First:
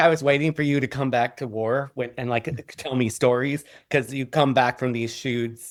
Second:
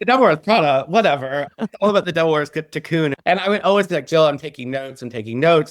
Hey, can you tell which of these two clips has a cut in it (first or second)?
second